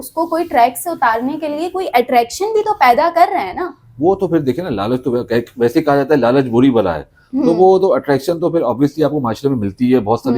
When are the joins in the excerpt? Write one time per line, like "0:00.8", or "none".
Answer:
none